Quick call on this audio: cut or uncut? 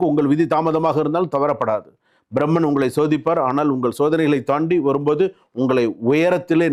uncut